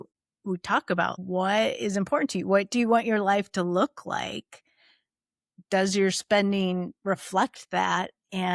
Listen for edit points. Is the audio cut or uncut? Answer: cut